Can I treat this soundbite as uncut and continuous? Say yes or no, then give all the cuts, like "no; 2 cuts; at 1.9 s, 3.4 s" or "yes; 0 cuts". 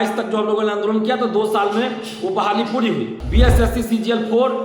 no; 1 cut; at 3.2 s